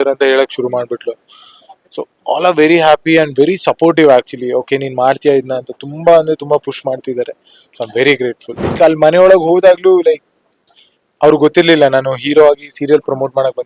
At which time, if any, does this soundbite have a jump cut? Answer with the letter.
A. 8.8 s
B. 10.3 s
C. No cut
A